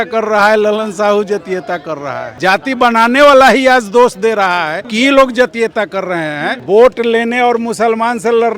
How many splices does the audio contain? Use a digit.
3